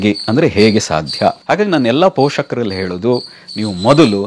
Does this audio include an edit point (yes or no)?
yes